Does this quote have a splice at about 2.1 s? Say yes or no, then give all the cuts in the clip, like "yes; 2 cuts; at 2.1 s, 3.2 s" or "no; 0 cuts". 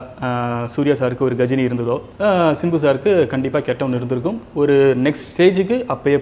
yes; 1 cut; at 2.1 s